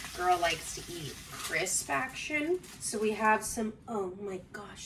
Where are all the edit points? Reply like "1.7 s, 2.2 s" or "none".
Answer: 1.4 s, 2.8 s